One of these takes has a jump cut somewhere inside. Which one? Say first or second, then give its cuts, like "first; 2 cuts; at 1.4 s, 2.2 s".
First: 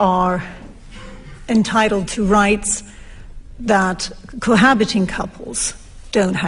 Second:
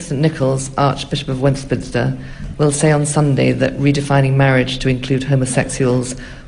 first; 1 cut; at 3.5 s